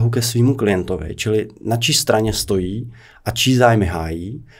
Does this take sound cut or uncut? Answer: uncut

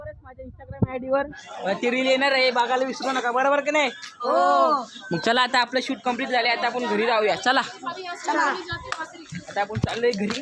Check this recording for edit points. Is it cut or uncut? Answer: uncut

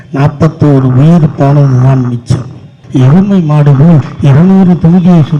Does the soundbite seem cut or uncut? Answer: cut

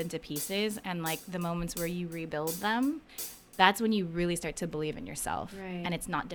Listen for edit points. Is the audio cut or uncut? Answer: uncut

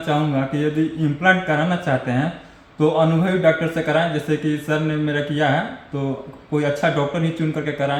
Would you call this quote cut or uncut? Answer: uncut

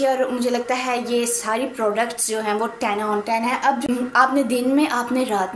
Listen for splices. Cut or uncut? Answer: cut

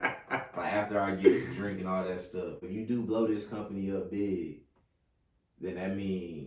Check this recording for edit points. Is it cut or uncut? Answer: cut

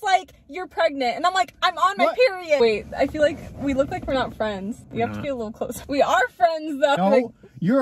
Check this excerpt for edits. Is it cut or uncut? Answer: cut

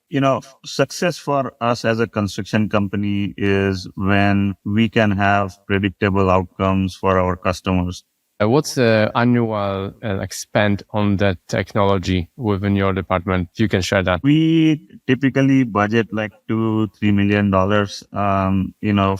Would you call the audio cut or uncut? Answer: cut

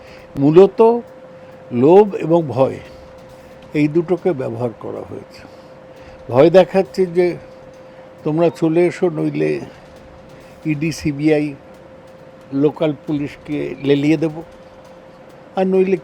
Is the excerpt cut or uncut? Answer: uncut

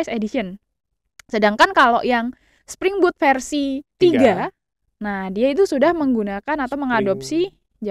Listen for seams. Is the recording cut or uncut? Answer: cut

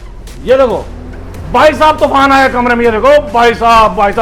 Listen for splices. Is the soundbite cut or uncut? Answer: uncut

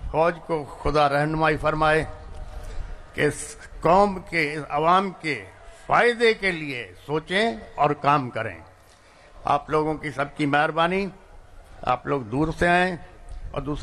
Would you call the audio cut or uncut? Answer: uncut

